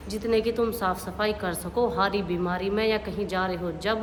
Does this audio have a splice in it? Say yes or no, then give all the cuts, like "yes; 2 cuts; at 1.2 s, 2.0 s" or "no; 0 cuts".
no; 0 cuts